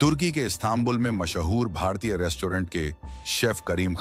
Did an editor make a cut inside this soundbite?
no; 0 cuts

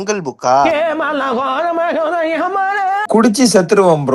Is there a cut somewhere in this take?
yes; 1 cut; at 3.0 s

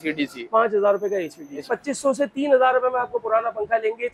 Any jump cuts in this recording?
yes; 1 cut; at 1.7 s

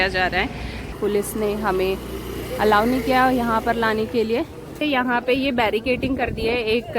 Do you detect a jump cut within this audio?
yes; 2 cuts; at 0.9 s, 4.8 s

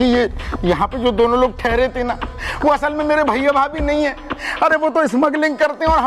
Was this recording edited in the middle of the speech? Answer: no; 0 cuts

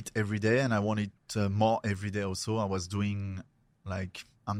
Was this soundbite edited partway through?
no; 0 cuts

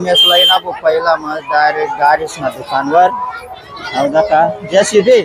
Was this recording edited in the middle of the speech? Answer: no; 0 cuts

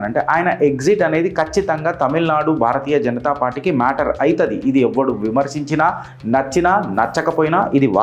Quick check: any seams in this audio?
no; 0 cuts

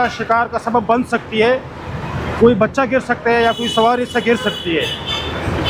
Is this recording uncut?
yes; 0 cuts

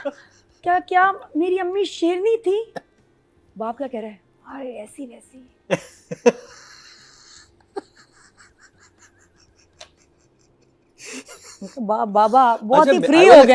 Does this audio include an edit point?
no; 0 cuts

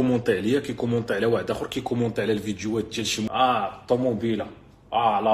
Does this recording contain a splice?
yes; 1 cut; at 3.3 s

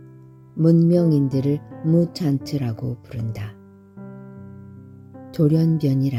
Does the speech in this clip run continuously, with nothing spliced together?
yes; 0 cuts

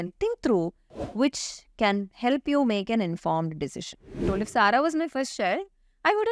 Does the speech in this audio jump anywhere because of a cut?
yes; 1 cut; at 4.2 s

